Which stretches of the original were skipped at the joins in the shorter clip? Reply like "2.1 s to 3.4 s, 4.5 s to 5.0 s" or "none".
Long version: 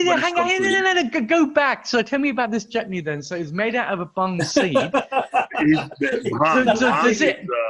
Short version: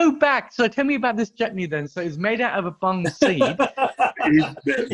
none

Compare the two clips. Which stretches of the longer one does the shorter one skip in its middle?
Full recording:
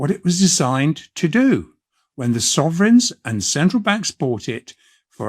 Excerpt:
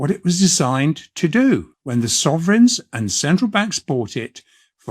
1.8 s to 2.1 s

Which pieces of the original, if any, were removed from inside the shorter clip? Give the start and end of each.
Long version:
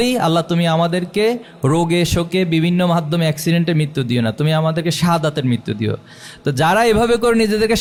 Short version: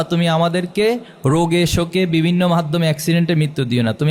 none

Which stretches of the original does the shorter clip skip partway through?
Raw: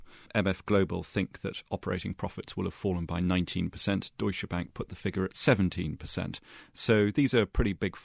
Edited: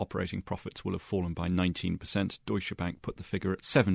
none

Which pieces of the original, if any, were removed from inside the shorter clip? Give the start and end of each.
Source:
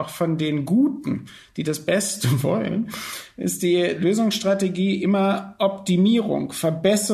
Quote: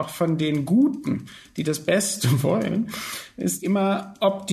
3.6 s to 5.0 s

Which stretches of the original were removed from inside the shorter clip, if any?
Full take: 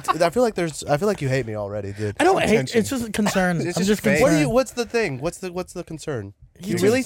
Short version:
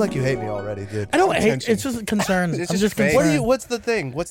none

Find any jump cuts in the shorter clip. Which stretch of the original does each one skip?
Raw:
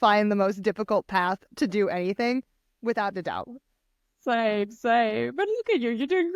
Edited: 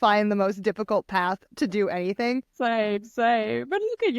2.5 s to 4.2 s

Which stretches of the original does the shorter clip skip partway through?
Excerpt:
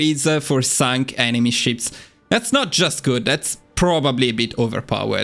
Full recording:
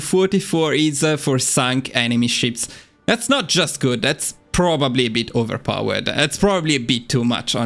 none

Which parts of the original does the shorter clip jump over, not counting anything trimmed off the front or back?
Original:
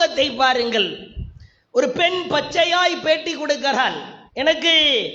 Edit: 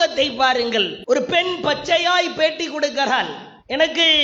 1.0 s to 1.6 s

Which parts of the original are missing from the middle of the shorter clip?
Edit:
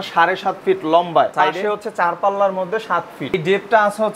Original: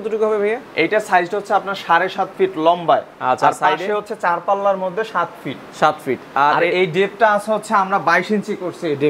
3.1 s to 3.6 s, 5.6 s to 6.9 s

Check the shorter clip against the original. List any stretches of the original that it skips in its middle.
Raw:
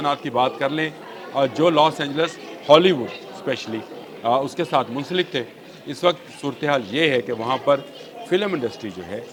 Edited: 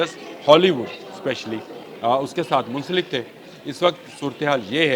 none

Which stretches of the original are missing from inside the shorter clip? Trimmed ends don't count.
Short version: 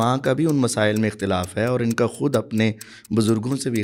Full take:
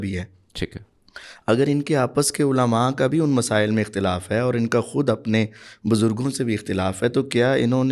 none

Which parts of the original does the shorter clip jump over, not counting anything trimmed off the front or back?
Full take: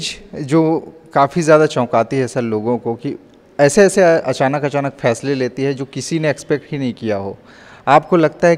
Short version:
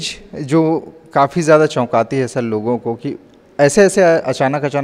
none

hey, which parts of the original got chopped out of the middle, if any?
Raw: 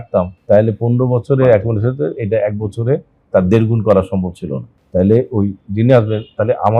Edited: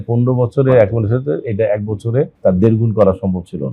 3.1 s to 3.2 s

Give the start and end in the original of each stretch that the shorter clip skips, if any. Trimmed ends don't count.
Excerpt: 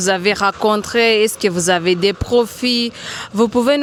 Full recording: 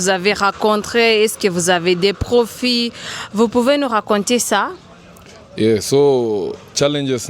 none

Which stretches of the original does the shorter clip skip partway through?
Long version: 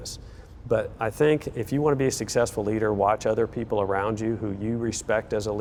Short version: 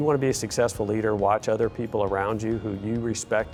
none

